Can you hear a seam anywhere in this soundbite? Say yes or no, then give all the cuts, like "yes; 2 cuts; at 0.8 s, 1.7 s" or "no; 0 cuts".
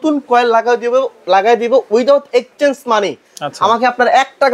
no; 0 cuts